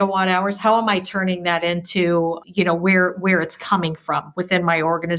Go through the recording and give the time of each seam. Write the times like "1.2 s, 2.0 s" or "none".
2.4 s